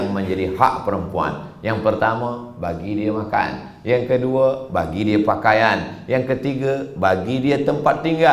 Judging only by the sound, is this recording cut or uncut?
uncut